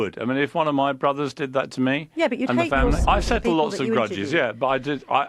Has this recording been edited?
yes; 1 cut; at 3.0 s

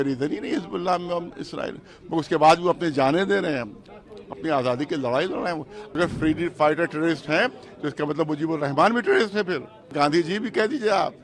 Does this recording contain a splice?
yes; 2 cuts; at 6.0 s, 9.9 s

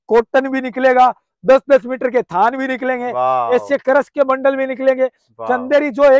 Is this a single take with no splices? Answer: yes; 0 cuts

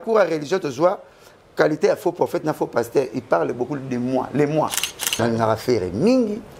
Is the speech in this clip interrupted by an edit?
yes; 1 cut; at 5.1 s

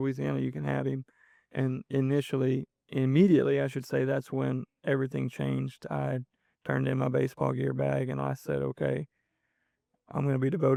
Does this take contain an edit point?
no; 0 cuts

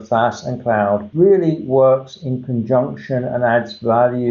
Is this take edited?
yes; 1 cut; at 1.1 s

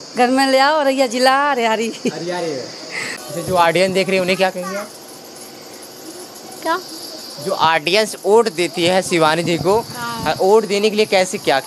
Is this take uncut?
no; 1 cut; at 3.2 s

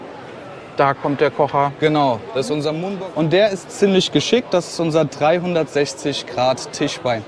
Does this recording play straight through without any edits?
no; 1 cut; at 2.8 s

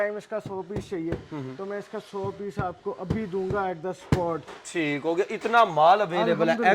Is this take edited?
no; 0 cuts

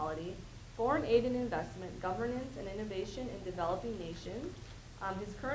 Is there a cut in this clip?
yes; 1 cut; at 3.8 s

